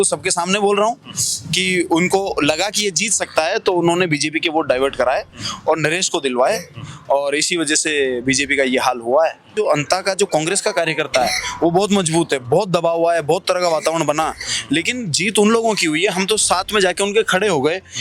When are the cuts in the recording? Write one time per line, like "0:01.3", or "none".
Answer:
0:09.5